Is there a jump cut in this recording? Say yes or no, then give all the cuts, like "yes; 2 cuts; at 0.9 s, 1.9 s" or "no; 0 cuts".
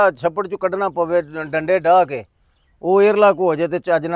no; 0 cuts